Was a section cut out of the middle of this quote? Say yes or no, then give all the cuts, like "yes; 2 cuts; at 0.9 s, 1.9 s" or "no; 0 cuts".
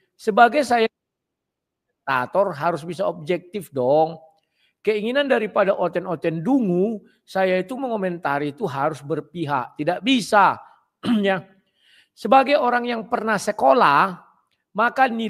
no; 0 cuts